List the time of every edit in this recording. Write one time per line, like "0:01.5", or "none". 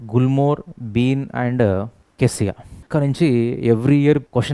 0:02.8